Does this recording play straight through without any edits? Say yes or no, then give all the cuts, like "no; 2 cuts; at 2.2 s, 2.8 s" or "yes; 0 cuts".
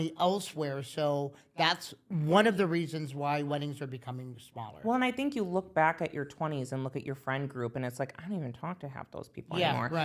yes; 0 cuts